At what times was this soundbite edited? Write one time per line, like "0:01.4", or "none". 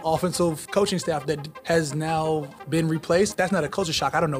0:01.5
0:02.5
0:03.3